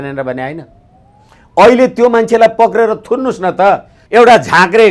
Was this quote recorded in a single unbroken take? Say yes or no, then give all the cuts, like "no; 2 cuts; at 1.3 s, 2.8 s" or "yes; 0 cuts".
no; 1 cut; at 3.9 s